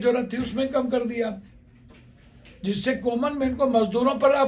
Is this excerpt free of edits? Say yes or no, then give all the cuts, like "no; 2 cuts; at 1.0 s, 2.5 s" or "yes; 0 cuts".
yes; 0 cuts